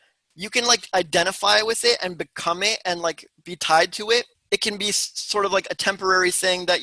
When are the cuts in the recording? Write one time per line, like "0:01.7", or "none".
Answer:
0:04.4